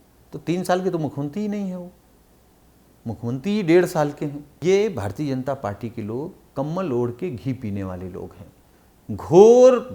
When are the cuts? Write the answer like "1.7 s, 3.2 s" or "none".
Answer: 4.5 s